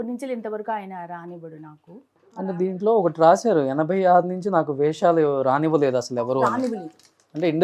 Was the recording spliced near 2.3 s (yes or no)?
yes